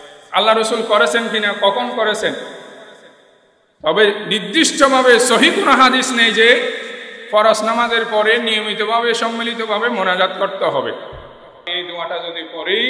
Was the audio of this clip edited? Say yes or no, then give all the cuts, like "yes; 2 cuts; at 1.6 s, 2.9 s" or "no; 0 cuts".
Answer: yes; 1 cut; at 11.6 s